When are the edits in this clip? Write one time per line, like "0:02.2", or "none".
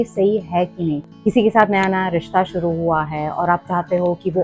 0:01.1